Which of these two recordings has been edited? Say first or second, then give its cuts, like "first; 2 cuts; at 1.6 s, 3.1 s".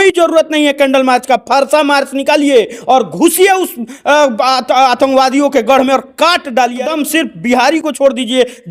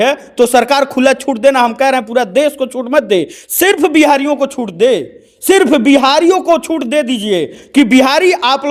first; 1 cut; at 6.9 s